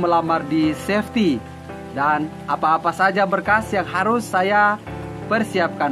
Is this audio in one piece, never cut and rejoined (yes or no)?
yes